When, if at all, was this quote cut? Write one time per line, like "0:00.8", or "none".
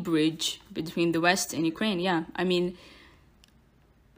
none